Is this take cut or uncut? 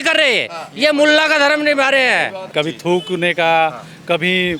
cut